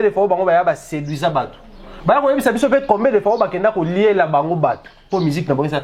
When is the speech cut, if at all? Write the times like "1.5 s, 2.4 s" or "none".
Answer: none